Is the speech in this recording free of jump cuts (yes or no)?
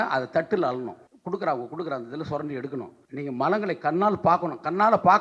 no